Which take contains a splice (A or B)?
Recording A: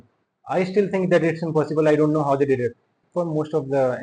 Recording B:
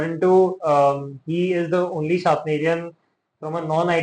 A